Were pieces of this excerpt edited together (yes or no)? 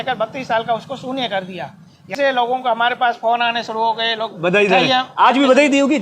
yes